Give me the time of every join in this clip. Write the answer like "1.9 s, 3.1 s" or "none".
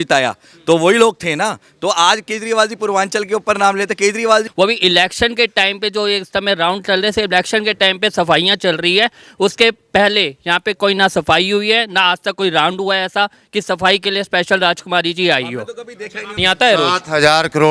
4.5 s, 16.2 s